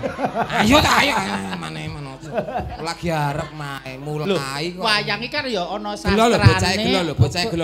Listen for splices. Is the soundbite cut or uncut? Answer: uncut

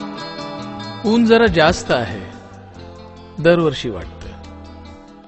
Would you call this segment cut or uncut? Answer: cut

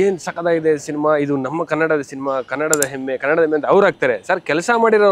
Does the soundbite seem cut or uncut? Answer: uncut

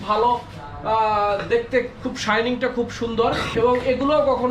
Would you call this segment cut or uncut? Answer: cut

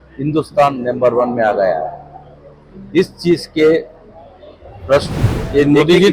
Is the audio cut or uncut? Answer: cut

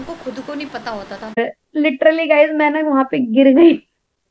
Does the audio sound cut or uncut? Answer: cut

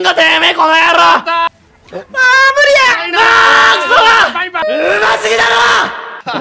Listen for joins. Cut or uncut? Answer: cut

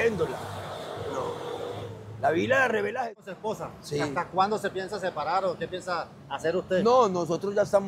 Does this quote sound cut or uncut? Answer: cut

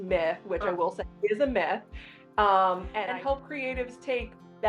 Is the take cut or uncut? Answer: cut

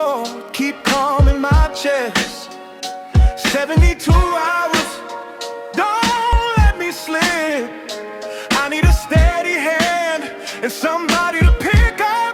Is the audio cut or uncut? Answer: cut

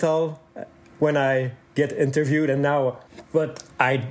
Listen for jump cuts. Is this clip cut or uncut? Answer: cut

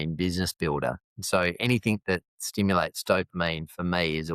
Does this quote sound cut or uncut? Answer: uncut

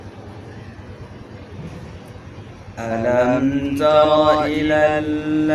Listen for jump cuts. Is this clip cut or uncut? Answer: uncut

